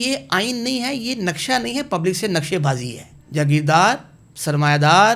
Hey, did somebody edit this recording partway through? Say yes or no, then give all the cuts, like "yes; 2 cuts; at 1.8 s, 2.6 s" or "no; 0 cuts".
yes; 1 cut; at 3.2 s